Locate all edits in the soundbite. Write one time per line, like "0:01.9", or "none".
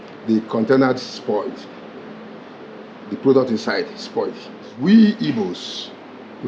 0:04.7